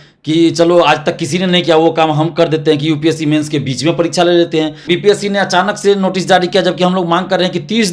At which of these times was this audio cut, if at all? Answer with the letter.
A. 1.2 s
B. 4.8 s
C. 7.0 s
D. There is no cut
B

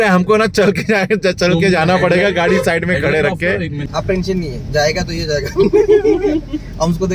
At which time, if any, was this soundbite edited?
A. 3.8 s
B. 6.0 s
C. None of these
A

